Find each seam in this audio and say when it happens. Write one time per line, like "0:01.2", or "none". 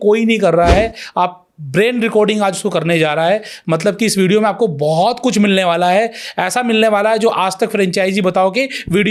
none

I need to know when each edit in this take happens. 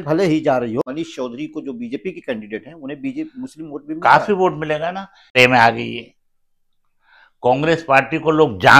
0:00.9
0:05.3

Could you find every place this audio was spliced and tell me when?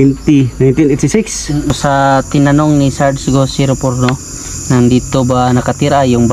0:01.7

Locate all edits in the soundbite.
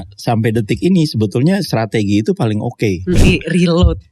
0:03.2

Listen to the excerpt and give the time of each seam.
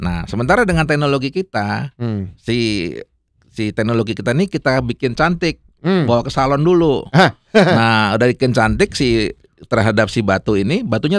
none

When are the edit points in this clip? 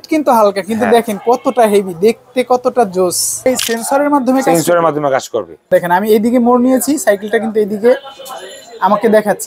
0:03.5
0:05.7

